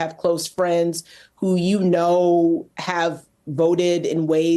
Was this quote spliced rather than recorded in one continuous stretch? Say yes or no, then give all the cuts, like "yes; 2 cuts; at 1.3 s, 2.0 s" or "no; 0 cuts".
no; 0 cuts